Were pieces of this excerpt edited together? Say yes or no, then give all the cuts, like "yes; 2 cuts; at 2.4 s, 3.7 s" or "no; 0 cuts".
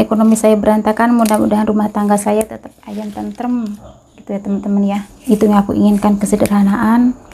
yes; 1 cut; at 5.1 s